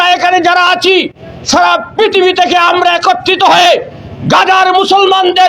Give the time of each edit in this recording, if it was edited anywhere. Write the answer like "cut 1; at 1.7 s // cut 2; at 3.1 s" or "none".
none